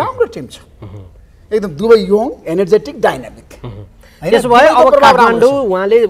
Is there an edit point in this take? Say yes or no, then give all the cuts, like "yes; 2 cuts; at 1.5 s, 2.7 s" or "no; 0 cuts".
no; 0 cuts